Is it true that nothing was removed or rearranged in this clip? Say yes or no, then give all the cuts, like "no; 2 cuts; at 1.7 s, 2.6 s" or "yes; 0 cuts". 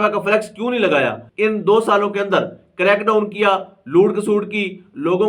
no; 1 cut; at 1.2 s